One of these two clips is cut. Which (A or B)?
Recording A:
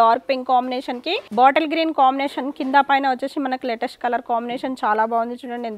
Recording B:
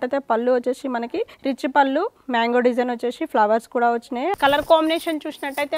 B